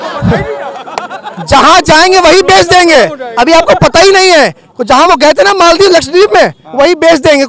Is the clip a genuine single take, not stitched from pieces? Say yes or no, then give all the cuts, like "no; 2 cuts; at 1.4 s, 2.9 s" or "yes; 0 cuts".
yes; 0 cuts